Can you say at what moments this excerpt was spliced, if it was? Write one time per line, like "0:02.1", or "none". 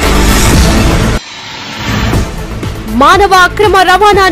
0:01.1